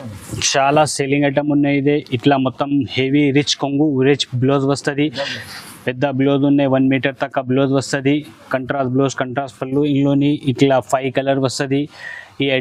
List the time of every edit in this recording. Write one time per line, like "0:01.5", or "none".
none